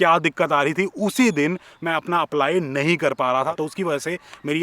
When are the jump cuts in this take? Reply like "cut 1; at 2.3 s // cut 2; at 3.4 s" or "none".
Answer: cut 1; at 3.5 s

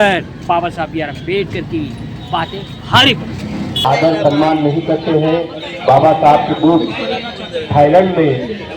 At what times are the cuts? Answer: cut 1; at 3.7 s

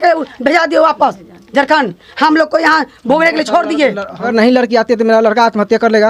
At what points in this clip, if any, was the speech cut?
cut 1; at 4.3 s

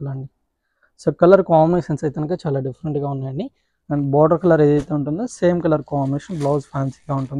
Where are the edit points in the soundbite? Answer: cut 1; at 3.7 s

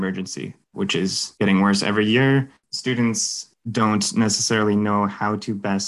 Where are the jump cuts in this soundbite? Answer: cut 1; at 1.0 s

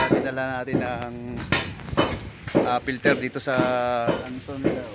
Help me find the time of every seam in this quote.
none

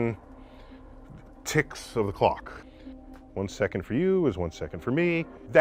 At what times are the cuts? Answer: none

